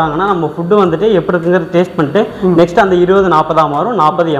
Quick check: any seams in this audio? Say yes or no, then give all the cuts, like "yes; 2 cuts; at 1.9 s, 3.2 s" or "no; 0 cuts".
no; 0 cuts